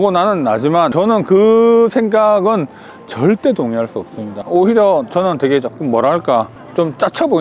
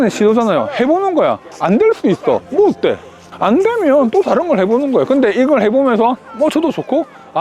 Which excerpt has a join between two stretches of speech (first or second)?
first